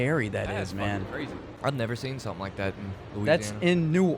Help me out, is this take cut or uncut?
cut